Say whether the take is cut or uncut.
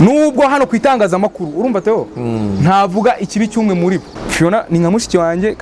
cut